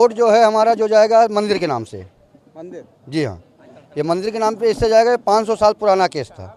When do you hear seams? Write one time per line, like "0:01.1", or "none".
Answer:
none